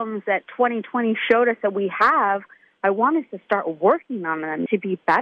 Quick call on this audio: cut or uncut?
uncut